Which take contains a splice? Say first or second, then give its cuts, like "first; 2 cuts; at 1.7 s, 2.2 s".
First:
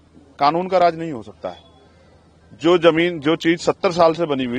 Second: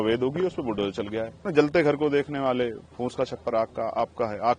second; 1 cut; at 1.5 s